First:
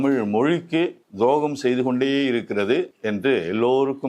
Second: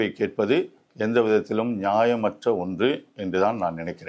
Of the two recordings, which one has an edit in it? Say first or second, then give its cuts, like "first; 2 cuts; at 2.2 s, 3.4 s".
first; 2 cuts; at 1.0 s, 3.0 s